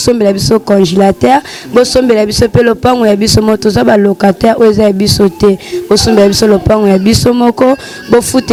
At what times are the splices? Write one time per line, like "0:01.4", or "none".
none